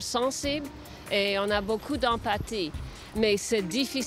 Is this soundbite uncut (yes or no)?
yes